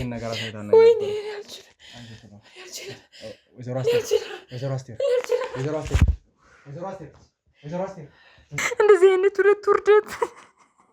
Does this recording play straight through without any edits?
no; 1 cut; at 8.6 s

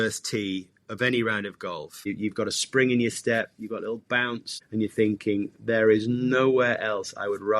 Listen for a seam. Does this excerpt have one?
yes; 2 cuts; at 2.1 s, 4.5 s

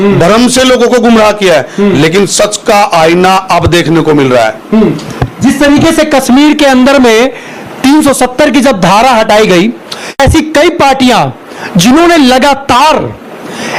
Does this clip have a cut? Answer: no; 0 cuts

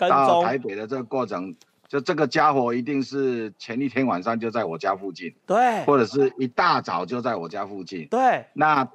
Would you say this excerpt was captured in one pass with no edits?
yes; 0 cuts

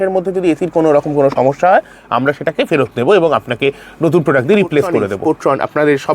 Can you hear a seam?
yes; 1 cut; at 5.2 s

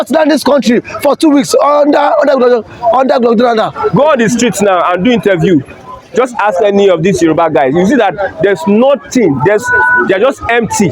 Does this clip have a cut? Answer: yes; 1 cut; at 3.9 s

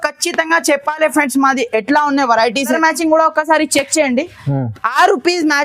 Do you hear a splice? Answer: yes; 1 cut; at 2.8 s

